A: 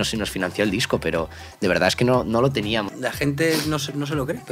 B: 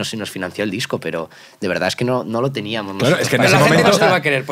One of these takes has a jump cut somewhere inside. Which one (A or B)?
A